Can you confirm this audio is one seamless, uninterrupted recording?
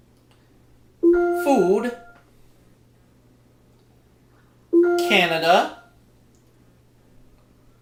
yes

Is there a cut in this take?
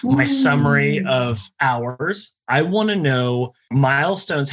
yes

